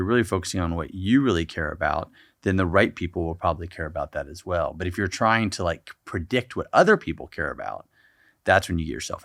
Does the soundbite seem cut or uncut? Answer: uncut